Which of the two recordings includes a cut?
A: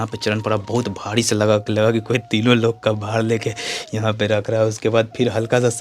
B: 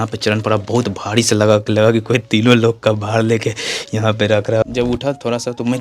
B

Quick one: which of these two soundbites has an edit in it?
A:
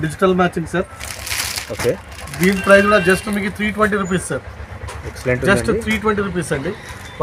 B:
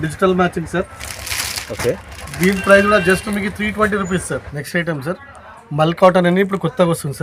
B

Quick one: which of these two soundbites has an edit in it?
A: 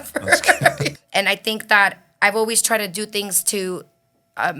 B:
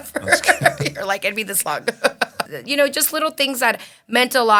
A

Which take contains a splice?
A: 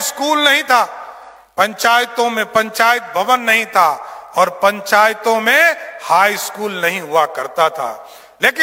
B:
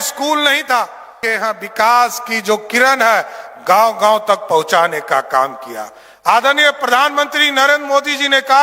B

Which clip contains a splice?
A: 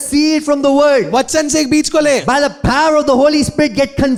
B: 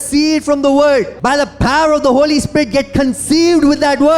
B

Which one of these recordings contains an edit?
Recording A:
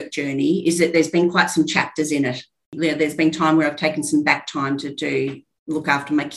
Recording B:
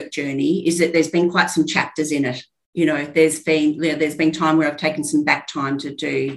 A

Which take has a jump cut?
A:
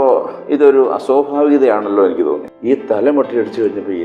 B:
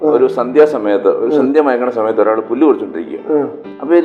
A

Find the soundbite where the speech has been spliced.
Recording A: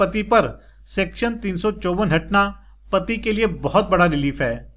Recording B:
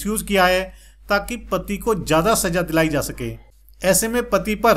B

